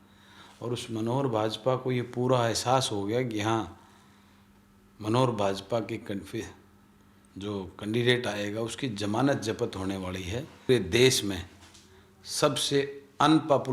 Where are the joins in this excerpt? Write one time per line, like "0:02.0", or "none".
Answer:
0:10.7